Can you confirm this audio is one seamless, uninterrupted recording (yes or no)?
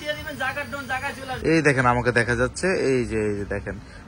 no